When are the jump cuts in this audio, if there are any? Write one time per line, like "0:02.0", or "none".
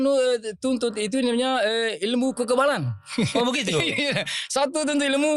none

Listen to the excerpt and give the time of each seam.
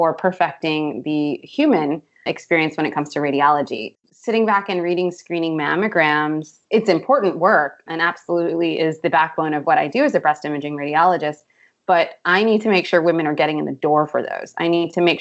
0:03.8

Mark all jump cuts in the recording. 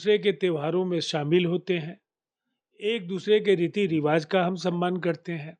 none

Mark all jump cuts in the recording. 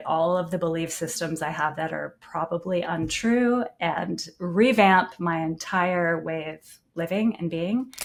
none

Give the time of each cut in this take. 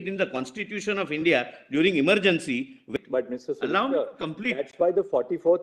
0:02.9

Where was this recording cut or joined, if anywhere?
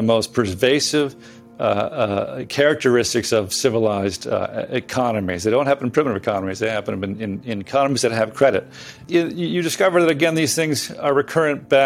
0:08.9

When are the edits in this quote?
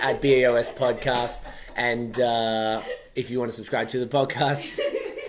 none

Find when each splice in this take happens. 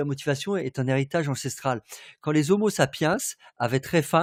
none

